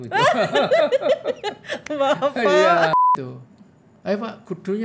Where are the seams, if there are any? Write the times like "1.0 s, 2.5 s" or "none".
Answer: 2.9 s